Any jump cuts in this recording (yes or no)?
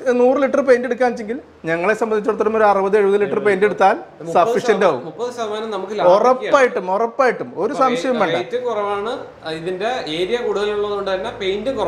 no